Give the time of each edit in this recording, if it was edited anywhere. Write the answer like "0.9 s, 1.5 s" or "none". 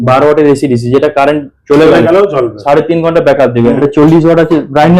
3.8 s